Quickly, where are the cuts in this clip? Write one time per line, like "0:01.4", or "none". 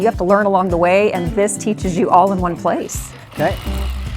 0:03.0